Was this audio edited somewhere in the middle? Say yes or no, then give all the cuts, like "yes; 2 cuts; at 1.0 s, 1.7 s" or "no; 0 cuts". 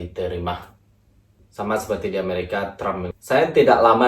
yes; 1 cut; at 3.1 s